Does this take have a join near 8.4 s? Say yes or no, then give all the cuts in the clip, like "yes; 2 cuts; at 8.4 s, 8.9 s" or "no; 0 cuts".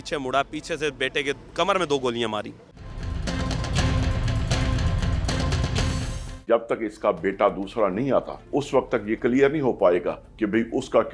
yes; 4 cuts; at 3.0 s, 6.4 s, 8.4 s, 10.2 s